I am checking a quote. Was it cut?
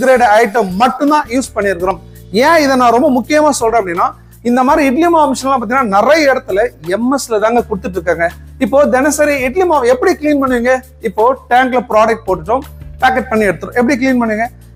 no; 0 cuts

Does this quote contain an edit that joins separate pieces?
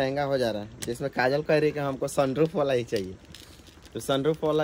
no; 0 cuts

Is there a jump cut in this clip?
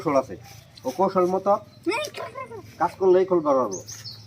no; 0 cuts

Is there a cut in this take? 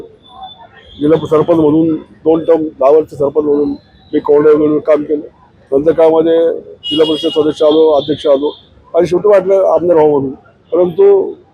no; 0 cuts

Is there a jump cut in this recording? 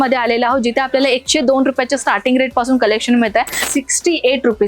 yes; 1 cut; at 3.6 s

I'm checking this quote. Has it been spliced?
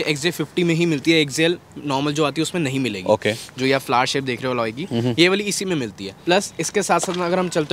no; 0 cuts

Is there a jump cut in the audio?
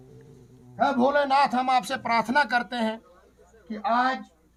no; 0 cuts

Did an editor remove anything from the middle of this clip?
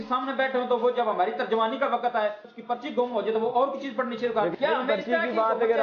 yes; 2 cuts; at 2.5 s, 4.5 s

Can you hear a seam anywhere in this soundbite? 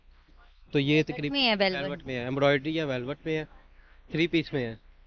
no; 0 cuts

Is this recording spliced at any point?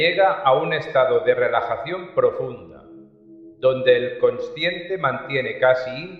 yes; 1 cut; at 4.5 s

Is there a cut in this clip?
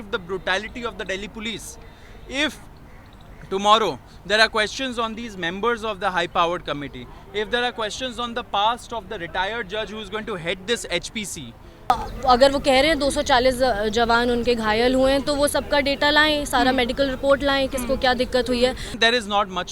yes; 2 cuts; at 11.9 s, 19.0 s

